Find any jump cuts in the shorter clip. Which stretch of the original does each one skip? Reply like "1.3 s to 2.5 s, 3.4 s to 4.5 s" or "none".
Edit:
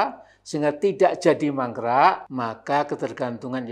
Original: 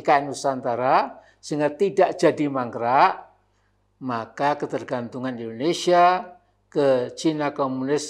3.2 s to 4.0 s